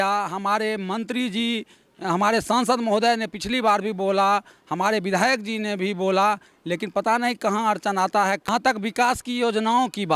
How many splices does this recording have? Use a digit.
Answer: 1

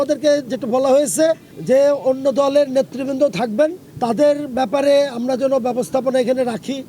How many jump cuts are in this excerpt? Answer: 2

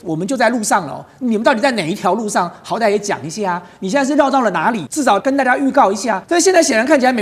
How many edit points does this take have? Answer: 2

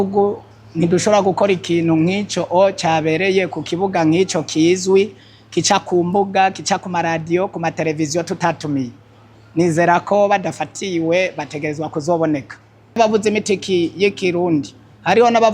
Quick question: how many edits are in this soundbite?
1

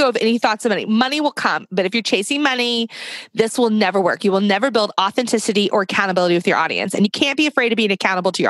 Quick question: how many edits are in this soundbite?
1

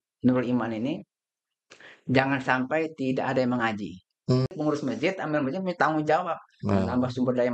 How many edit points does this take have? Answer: 1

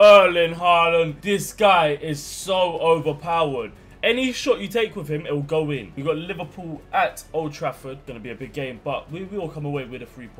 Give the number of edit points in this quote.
3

